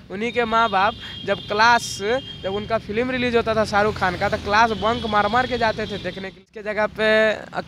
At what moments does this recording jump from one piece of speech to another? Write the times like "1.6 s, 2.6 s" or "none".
6.4 s